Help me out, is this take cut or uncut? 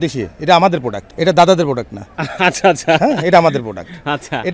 uncut